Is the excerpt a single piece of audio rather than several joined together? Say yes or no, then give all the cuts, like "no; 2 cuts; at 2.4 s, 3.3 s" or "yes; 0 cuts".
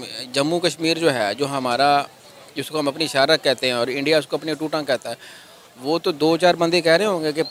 yes; 0 cuts